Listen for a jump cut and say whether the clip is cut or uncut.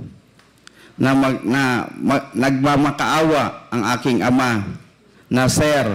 uncut